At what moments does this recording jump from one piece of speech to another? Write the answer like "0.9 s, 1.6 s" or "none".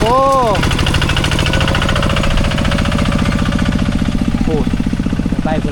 none